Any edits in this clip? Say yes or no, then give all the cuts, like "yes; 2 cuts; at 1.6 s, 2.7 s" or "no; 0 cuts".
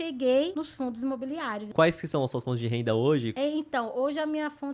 yes; 1 cut; at 1.7 s